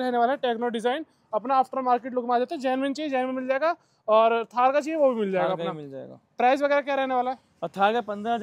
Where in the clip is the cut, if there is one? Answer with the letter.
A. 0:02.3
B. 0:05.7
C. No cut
C